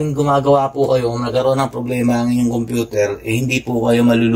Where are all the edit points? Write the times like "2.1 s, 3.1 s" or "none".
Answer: none